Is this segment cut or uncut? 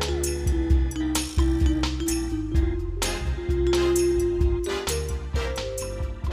uncut